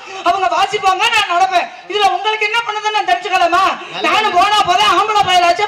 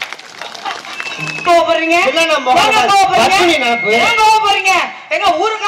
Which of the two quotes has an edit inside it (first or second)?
second